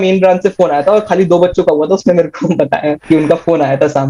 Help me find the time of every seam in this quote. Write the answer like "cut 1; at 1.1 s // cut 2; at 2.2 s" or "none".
none